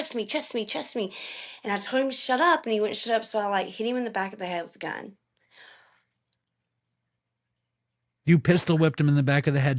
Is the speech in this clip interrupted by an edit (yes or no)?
no